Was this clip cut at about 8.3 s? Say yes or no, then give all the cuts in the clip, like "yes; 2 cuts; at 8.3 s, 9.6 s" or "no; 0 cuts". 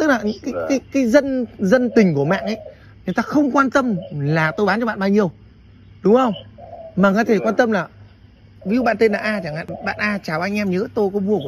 no; 1 cut; at 9.8 s